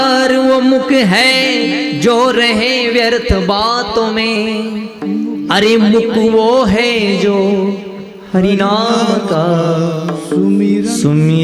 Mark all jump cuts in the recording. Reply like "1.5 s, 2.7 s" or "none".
none